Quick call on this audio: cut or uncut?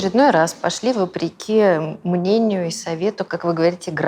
uncut